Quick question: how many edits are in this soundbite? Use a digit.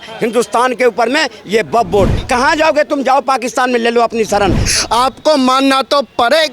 2